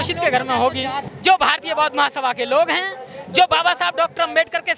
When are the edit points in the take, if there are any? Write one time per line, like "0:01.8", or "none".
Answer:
0:01.1